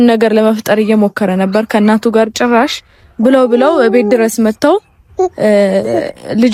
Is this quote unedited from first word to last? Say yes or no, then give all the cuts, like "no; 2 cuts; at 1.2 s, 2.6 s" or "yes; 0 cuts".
yes; 0 cuts